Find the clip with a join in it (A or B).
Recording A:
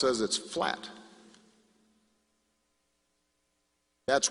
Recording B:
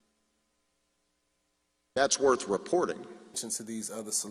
B